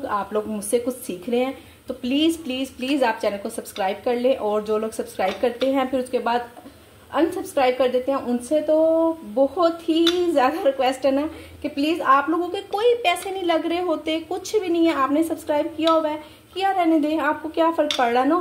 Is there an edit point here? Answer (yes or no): no